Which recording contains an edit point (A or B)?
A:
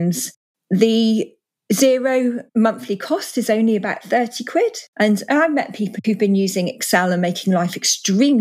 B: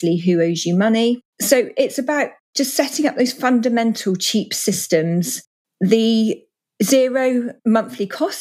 A